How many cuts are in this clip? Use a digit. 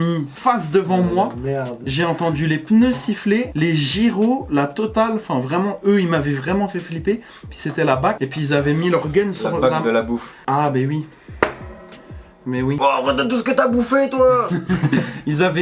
0